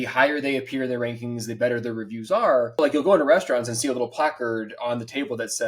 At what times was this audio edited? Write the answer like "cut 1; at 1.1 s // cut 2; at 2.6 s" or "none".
cut 1; at 2.8 s